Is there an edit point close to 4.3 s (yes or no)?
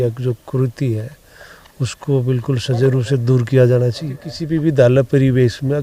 yes